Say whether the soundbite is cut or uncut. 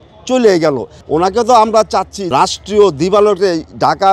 cut